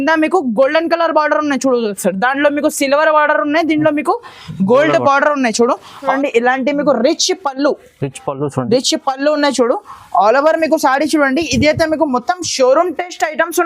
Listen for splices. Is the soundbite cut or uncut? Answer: cut